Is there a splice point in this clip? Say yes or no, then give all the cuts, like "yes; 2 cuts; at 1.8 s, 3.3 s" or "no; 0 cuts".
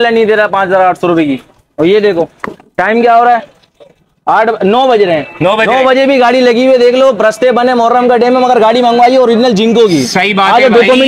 no; 0 cuts